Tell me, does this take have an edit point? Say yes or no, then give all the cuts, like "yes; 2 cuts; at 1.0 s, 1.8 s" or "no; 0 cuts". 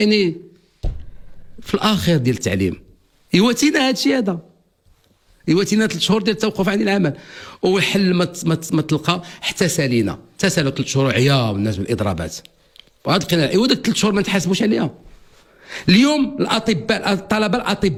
no; 0 cuts